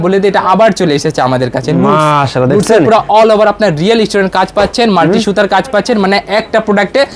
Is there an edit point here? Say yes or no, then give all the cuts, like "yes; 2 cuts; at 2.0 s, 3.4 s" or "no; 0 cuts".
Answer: no; 0 cuts